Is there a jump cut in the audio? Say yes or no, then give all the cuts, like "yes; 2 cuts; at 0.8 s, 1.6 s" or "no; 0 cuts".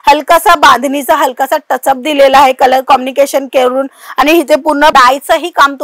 no; 0 cuts